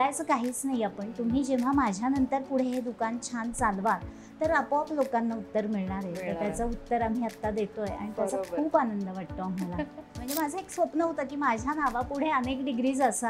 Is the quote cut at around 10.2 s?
yes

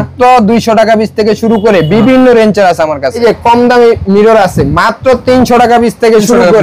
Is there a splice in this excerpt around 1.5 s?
no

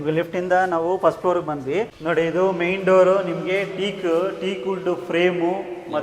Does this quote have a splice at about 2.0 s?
yes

